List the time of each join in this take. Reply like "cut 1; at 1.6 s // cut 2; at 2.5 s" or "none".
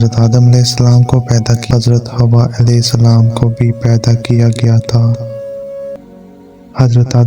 cut 1; at 1.6 s // cut 2; at 6.0 s